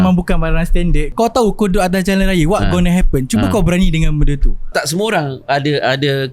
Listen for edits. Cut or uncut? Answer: cut